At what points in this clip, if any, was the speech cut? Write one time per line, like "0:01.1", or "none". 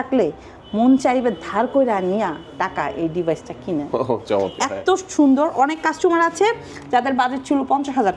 none